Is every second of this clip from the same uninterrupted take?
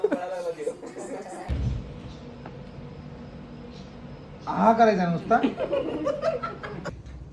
yes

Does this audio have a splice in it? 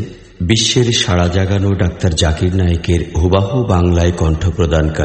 yes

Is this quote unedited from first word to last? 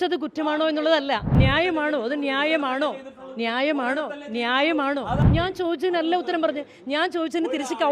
no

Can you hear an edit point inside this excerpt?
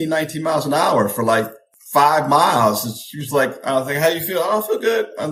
no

